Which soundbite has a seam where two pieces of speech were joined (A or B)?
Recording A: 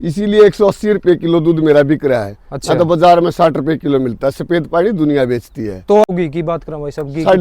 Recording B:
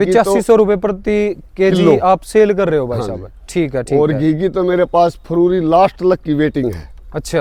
A